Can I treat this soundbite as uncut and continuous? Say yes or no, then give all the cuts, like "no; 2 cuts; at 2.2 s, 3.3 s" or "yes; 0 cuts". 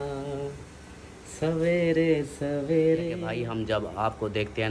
no; 1 cut; at 3.3 s